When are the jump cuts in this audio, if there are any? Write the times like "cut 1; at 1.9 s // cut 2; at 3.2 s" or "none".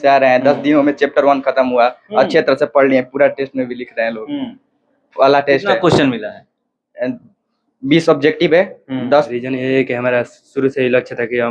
cut 1; at 9.4 s